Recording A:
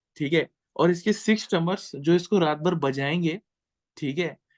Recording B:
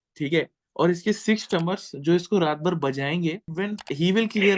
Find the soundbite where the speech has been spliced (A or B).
B